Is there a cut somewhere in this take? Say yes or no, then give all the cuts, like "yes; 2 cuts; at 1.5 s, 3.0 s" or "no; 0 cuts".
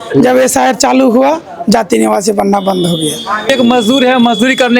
yes; 1 cut; at 3.5 s